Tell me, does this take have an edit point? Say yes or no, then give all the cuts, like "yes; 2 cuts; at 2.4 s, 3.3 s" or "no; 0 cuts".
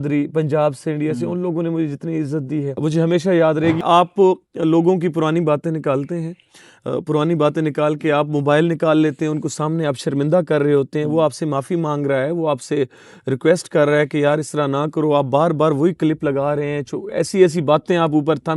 yes; 2 cuts; at 2.8 s, 3.8 s